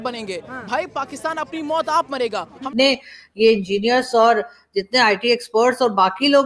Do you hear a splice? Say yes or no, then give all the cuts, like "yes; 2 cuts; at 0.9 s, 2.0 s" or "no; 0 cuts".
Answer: yes; 1 cut; at 2.7 s